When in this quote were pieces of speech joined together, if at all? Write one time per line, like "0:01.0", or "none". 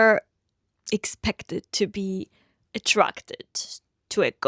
none